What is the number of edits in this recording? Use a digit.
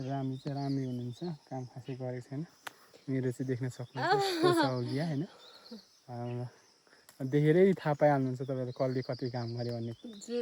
0